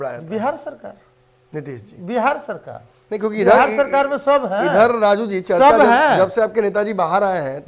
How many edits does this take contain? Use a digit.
0